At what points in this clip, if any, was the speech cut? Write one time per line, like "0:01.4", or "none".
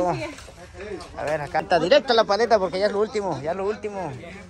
0:01.6